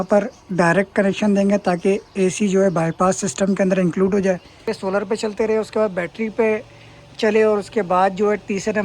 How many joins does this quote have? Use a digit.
1